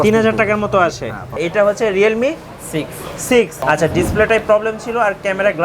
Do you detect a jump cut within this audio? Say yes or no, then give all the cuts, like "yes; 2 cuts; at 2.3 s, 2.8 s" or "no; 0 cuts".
yes; 2 cuts; at 1.3 s, 3.6 s